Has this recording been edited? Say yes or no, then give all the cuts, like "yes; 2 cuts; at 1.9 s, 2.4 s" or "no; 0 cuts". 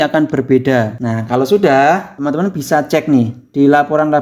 yes; 2 cuts; at 1.0 s, 2.1 s